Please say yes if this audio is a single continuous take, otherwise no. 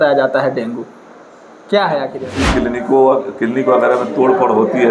no